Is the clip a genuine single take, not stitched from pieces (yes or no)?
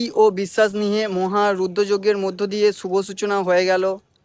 yes